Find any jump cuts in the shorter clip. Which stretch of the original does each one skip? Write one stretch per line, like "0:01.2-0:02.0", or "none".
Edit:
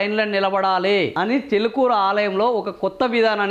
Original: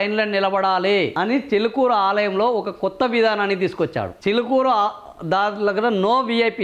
none